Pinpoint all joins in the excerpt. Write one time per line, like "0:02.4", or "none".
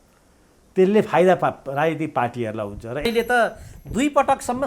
0:03.0